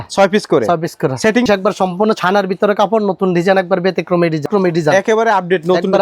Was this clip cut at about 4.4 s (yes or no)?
yes